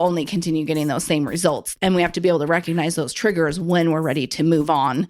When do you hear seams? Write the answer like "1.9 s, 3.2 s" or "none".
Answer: 1.7 s

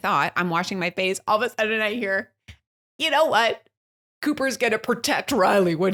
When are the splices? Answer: none

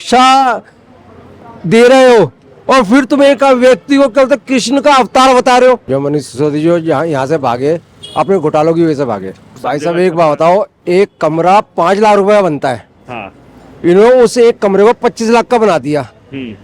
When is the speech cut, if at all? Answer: 5.8 s, 9.6 s

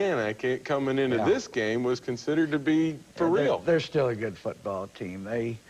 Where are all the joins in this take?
3.2 s

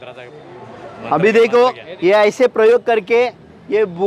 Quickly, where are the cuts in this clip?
1.9 s

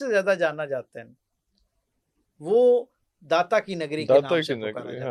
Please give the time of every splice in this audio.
none

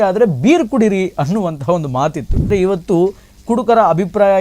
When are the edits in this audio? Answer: 2.5 s

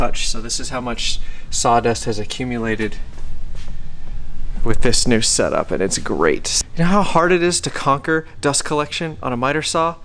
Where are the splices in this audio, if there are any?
6.6 s

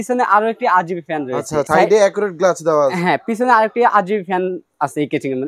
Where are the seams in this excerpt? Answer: none

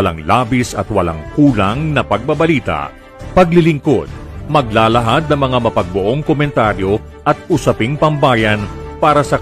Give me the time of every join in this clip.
none

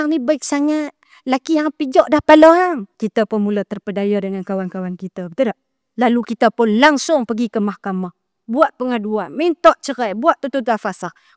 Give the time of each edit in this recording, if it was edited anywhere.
2.9 s

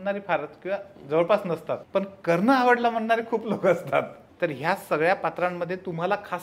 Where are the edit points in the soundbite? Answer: 1.8 s, 4.2 s

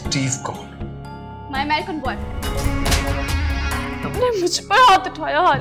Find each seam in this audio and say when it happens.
2.4 s, 4.0 s

